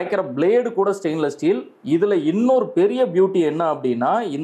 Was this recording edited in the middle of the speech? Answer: no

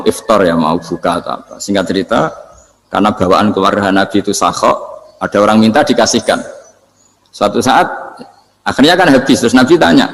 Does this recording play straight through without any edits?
yes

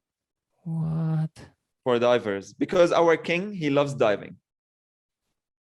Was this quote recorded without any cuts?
yes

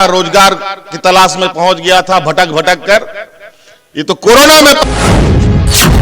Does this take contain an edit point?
yes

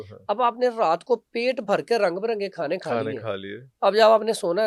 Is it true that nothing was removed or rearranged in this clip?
yes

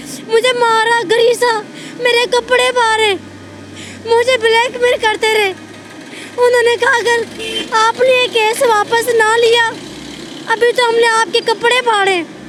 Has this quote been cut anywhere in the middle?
no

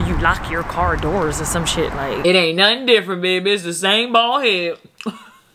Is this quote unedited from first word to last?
no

